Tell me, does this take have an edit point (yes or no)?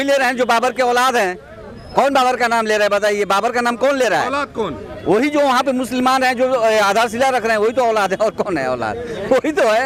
no